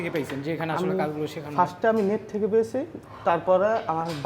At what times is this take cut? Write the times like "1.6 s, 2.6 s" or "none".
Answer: none